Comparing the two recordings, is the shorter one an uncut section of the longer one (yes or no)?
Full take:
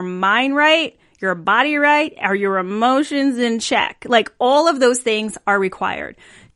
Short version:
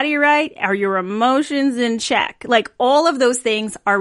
yes